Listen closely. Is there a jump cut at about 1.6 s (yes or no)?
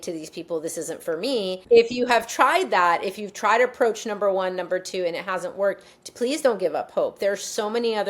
yes